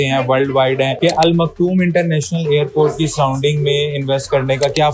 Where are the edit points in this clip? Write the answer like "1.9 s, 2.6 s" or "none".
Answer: none

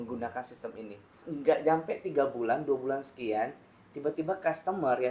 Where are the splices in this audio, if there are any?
1.3 s

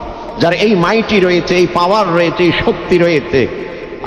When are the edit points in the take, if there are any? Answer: none

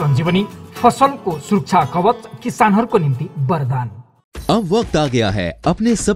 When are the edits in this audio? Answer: none

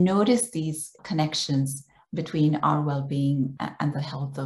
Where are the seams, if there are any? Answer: 1.0 s, 3.5 s

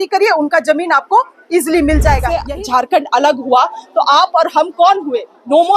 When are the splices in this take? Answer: 2.3 s

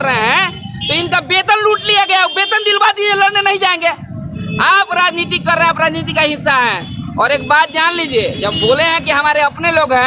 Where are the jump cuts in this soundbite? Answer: none

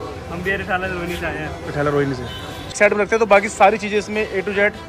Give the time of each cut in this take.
2.7 s

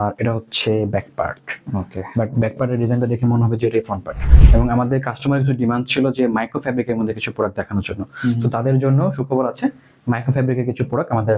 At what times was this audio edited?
4.2 s

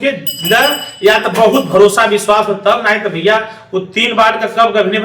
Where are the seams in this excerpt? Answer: none

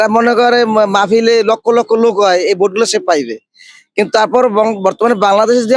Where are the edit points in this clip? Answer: none

